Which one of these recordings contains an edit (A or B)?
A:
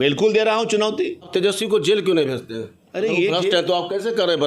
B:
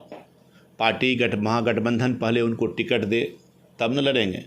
A